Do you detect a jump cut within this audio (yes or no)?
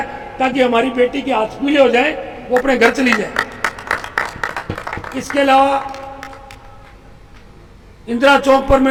no